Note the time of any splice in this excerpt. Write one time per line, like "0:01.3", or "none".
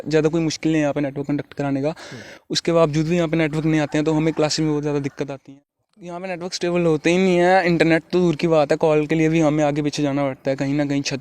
0:05.4